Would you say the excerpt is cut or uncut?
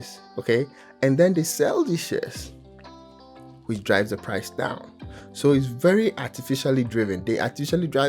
uncut